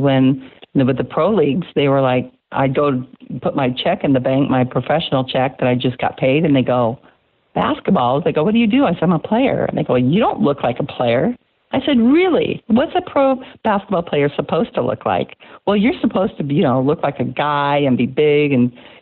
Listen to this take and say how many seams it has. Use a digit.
0